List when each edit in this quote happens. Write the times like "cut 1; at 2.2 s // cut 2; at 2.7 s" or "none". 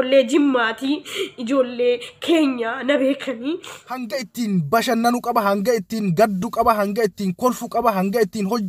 cut 1; at 4.2 s